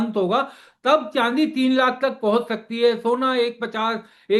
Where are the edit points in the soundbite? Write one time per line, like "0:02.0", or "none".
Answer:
none